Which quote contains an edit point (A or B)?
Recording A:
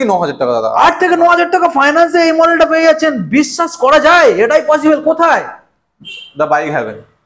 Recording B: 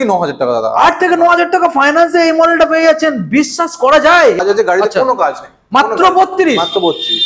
B